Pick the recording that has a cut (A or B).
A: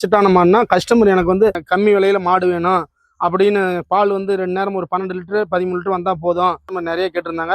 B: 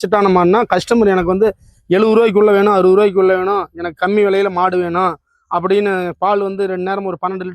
A